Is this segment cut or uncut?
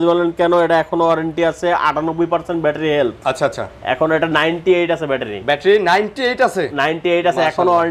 uncut